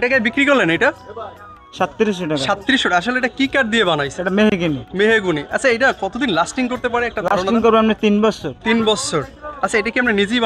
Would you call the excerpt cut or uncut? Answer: uncut